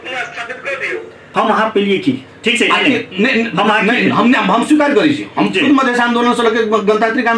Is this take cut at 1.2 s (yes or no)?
yes